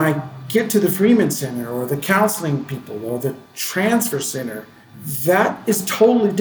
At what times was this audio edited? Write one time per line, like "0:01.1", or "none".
none